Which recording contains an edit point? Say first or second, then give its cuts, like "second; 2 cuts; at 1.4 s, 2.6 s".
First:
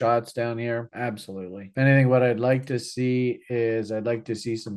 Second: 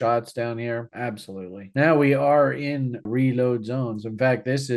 second; 2 cuts; at 1.7 s, 3.0 s